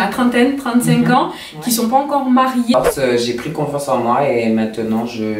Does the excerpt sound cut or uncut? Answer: cut